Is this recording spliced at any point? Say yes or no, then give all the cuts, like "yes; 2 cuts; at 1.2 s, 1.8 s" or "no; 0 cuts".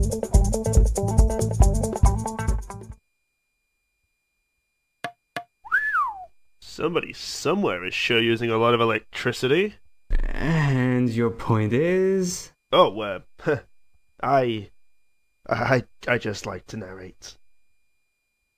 no; 0 cuts